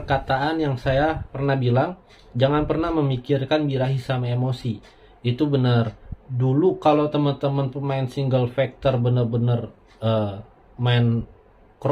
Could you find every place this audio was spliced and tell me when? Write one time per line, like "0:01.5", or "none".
0:01.6
0:06.1